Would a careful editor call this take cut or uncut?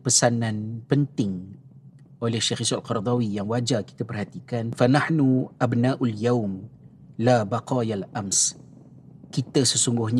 cut